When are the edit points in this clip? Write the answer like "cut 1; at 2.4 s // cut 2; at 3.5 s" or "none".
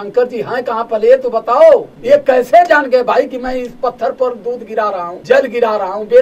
cut 1; at 1.9 s // cut 2; at 5.1 s